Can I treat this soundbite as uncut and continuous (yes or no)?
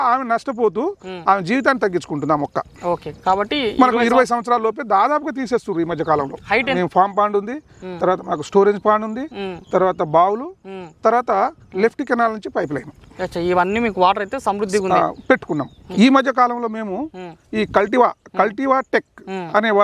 no